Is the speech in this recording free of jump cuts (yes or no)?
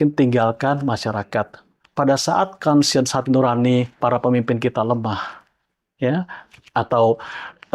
yes